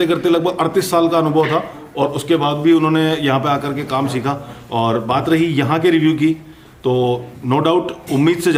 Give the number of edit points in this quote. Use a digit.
0